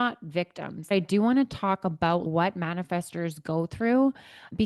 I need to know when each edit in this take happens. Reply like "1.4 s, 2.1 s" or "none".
0.9 s